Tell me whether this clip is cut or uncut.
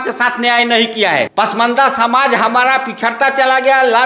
cut